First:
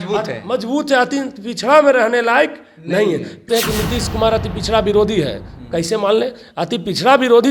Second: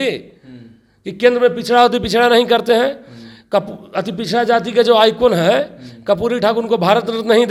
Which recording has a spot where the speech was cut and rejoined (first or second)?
first